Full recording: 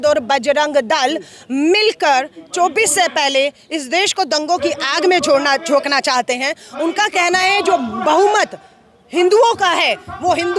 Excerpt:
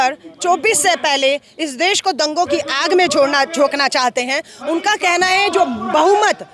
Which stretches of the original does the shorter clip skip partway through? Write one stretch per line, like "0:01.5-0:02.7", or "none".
none